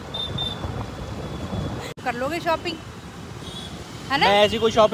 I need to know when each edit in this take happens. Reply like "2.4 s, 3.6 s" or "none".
2.0 s